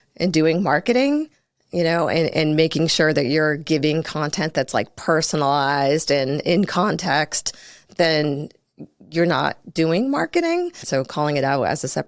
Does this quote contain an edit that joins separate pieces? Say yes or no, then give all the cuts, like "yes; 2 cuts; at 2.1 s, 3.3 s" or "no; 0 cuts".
yes; 1 cut; at 10.8 s